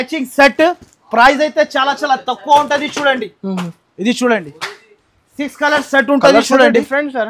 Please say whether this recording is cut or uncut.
uncut